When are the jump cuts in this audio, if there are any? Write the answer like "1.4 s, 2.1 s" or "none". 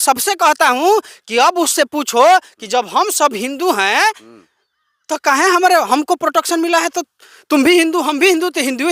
none